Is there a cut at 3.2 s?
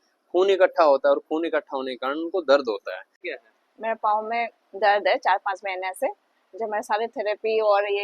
yes; 1 cut; at 3.2 s

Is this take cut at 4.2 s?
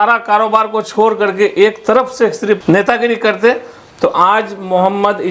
no; 1 cut; at 2.6 s

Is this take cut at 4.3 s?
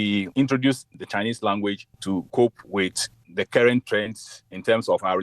no; 1 cut; at 2.0 s

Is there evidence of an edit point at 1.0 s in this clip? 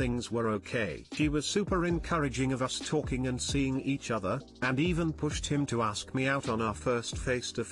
yes; 1 cut; at 1.0 s

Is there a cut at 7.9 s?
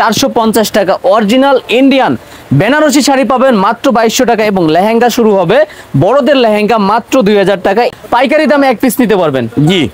yes; 1 cut; at 7.9 s

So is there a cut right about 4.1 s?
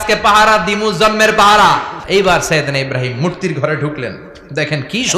no; 1 cut; at 2.0 s

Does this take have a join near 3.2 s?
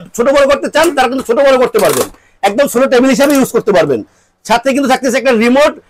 no; 0 cuts

